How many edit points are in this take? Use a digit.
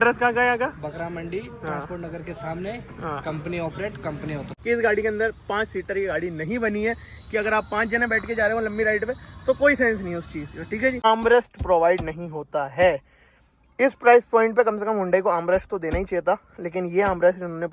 2